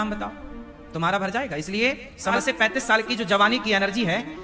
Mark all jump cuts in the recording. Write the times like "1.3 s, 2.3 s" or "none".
2.4 s